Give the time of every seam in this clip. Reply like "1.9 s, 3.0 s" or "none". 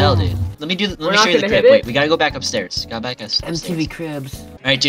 none